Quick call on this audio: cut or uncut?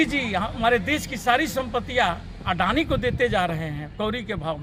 uncut